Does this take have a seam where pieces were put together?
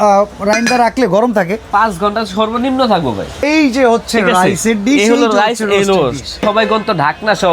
yes; 2 cuts; at 3.4 s, 6.4 s

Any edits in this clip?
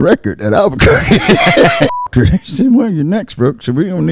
yes; 1 cut; at 2.0 s

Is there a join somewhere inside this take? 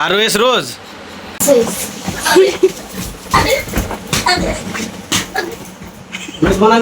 yes; 1 cut; at 1.4 s

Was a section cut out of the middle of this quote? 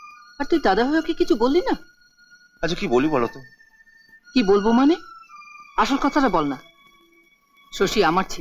no; 0 cuts

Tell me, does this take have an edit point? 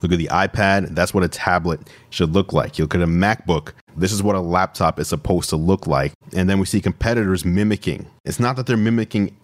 yes; 2 cuts; at 3.8 s, 8.3 s

